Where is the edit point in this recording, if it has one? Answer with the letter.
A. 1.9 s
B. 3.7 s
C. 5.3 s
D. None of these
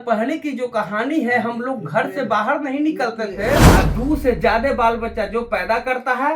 B